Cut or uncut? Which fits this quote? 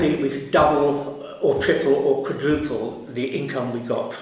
uncut